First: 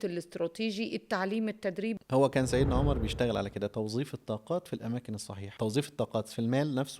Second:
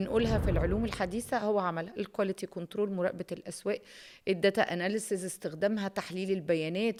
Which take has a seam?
first; 2 cuts; at 2.0 s, 5.4 s

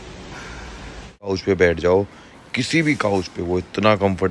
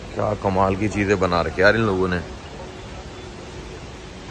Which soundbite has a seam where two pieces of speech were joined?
first; 1 cut; at 1.3 s

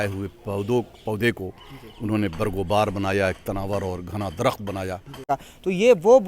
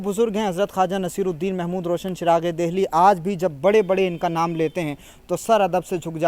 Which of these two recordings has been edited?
first; 1 cut; at 5.3 s

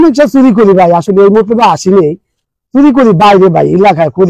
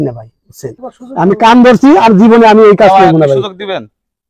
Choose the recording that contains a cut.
second; 1 cut; at 1.0 s

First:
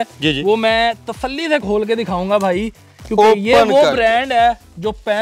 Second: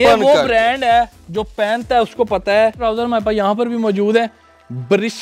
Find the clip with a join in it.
second; 1 cut; at 2.8 s

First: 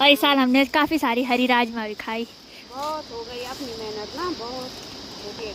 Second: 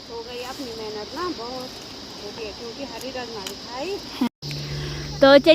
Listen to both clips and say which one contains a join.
second; 1 cut; at 4.3 s

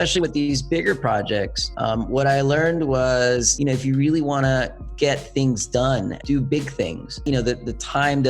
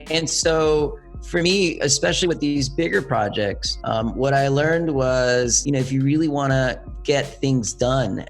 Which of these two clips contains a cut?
first; 1 cut; at 7.2 s

